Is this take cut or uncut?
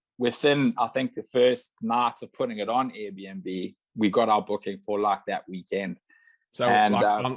uncut